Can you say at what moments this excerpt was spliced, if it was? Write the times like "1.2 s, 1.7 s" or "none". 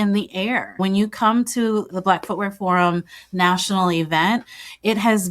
0.8 s, 1.9 s